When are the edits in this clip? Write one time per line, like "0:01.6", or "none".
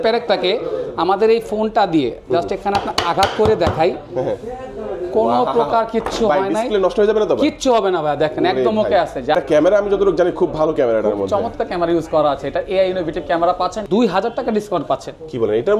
0:09.3
0:13.8